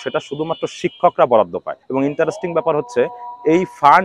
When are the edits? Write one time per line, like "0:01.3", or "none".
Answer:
0:01.8